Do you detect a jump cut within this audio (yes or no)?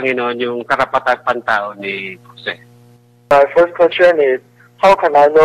yes